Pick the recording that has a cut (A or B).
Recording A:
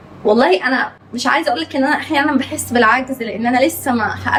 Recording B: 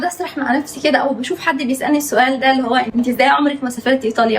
B